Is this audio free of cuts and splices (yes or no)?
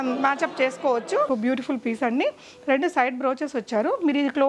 no